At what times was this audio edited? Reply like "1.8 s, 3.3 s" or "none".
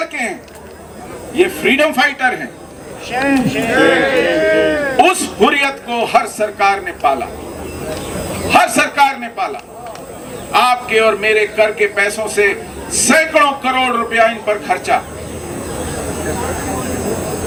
none